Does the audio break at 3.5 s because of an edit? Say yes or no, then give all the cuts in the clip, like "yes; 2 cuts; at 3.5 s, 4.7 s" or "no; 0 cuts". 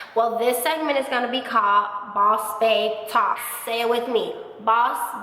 yes; 1 cut; at 3.5 s